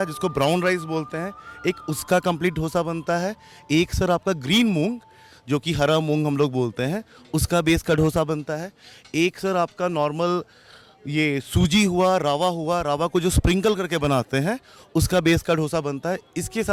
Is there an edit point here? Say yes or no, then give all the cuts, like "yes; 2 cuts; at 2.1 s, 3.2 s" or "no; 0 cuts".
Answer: no; 0 cuts